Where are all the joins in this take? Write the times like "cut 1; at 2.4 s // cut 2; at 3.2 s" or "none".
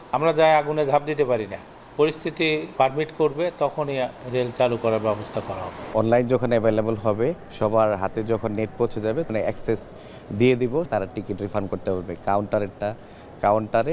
cut 1; at 4.2 s // cut 2; at 5.9 s // cut 3; at 7.5 s // cut 4; at 9.3 s // cut 5; at 10.9 s